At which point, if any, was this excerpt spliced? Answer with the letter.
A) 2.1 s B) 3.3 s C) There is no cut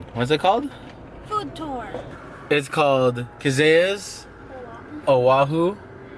A